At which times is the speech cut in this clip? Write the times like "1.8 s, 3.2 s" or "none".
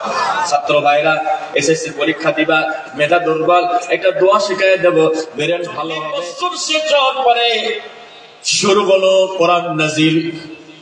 5.9 s